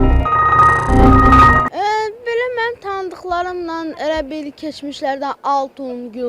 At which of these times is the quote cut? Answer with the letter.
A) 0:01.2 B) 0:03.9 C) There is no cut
C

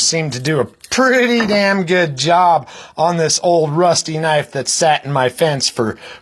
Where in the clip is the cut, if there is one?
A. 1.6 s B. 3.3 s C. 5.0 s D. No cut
C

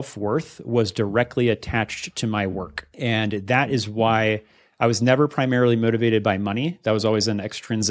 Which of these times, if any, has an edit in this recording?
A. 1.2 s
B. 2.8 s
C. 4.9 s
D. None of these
B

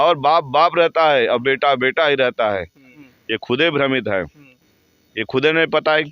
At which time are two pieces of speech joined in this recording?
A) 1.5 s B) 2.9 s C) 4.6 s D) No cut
B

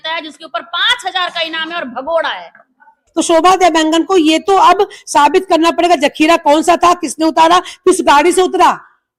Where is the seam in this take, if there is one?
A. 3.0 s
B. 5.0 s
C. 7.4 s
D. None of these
A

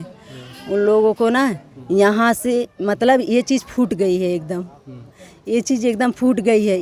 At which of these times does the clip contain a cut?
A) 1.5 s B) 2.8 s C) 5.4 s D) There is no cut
D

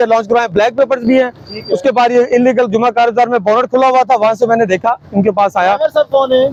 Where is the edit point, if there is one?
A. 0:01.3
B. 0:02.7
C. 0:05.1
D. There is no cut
D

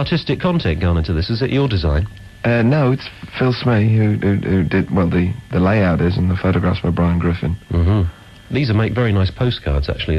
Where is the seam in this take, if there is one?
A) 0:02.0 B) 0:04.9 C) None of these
A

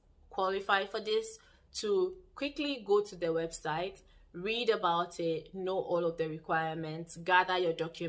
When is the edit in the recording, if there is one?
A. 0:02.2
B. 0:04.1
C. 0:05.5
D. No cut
D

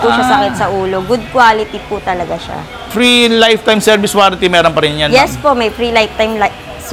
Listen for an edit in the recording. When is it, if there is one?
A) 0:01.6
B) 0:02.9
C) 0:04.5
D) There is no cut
B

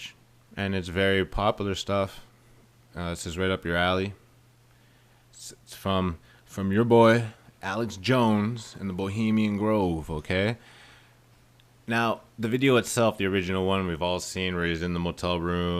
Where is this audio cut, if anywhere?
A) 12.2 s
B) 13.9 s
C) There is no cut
B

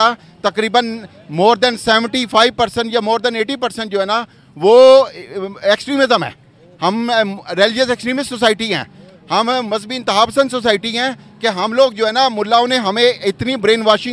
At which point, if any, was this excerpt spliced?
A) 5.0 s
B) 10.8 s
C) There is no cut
C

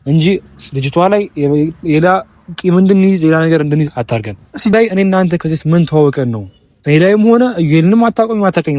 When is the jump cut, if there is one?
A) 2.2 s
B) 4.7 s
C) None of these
B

